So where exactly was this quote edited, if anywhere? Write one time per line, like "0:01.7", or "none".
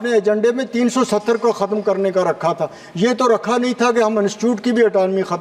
none